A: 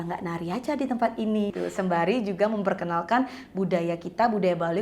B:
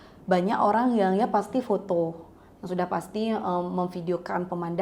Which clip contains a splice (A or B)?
A